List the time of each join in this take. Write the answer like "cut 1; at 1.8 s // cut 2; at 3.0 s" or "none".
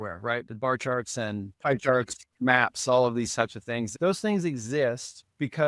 cut 1; at 1.5 s // cut 2; at 2.3 s // cut 3; at 3.9 s